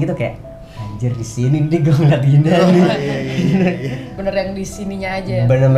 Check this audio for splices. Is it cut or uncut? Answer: cut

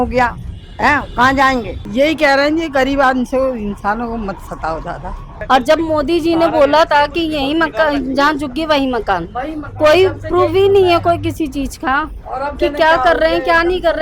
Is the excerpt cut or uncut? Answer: cut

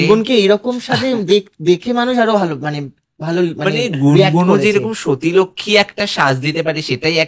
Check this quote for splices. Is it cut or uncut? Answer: uncut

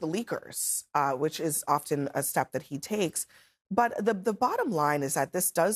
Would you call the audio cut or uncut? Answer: uncut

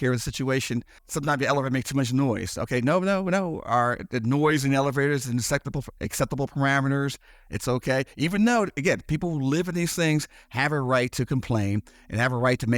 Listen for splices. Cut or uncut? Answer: cut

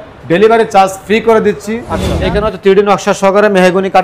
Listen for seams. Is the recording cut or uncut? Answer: cut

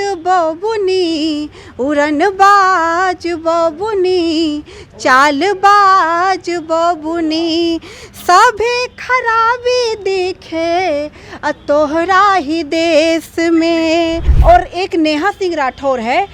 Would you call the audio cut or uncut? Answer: cut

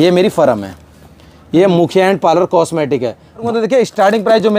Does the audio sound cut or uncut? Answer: cut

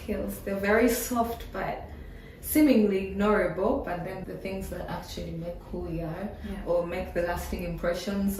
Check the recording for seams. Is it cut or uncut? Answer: uncut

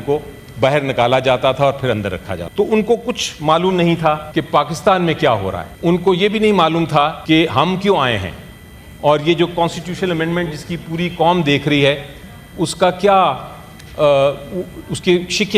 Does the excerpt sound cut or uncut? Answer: cut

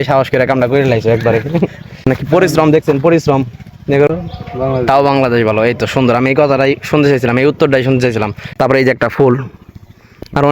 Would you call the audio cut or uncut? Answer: cut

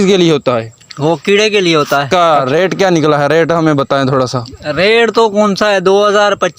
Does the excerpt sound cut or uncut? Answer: cut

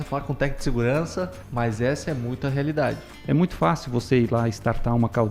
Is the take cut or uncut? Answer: cut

